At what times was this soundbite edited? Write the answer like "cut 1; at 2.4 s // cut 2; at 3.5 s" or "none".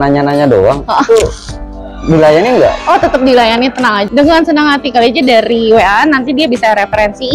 cut 1; at 4.3 s